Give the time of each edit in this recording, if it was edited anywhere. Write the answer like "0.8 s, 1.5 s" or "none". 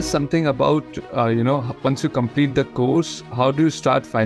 1.7 s